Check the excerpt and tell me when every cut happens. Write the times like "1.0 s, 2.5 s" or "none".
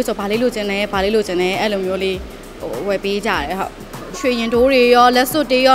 4.1 s